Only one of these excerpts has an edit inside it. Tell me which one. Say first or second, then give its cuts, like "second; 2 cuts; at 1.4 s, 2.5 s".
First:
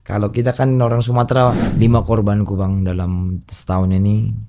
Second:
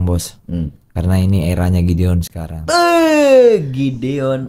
first; 1 cut; at 1.6 s